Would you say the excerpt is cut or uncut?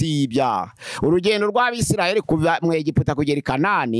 cut